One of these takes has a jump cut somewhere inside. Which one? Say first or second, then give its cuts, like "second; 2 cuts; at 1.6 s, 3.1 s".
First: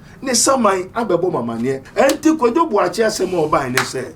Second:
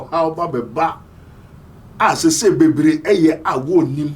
first; 1 cut; at 1.9 s